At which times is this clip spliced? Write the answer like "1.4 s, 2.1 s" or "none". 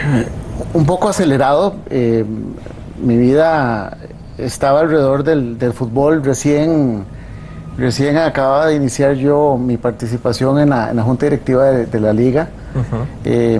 12.2 s